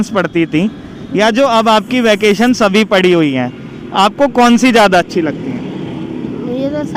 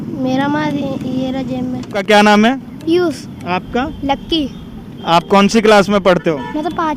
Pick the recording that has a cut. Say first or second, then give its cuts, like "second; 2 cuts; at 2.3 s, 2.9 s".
second; 1 cut; at 1.9 s